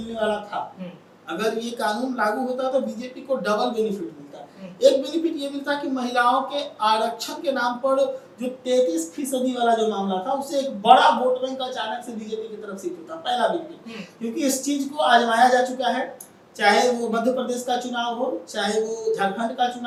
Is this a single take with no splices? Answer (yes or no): yes